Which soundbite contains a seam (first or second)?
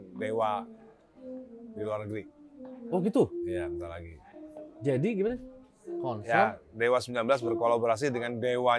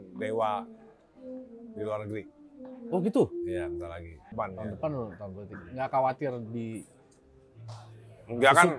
second